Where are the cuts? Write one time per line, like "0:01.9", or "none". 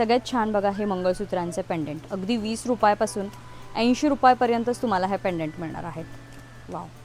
none